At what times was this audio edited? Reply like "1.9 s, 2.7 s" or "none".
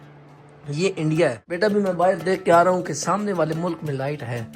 1.6 s